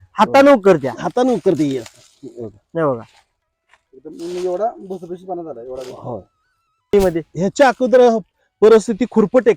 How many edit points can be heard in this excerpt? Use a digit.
1